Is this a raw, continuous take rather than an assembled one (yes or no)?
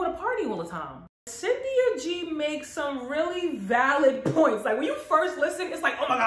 no